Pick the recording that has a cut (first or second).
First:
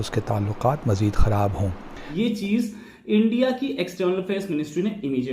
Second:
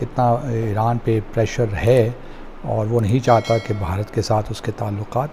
first